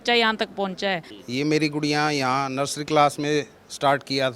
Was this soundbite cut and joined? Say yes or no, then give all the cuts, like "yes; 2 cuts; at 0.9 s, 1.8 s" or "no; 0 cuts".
yes; 1 cut; at 1.1 s